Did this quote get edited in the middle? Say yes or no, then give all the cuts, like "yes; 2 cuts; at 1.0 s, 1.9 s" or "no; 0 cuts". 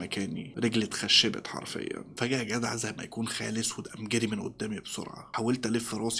no; 0 cuts